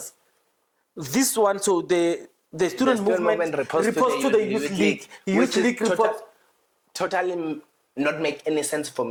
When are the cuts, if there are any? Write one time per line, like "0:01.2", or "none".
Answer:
none